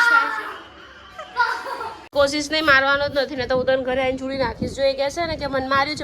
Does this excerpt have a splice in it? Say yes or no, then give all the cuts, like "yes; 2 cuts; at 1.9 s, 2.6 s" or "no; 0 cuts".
yes; 1 cut; at 2.1 s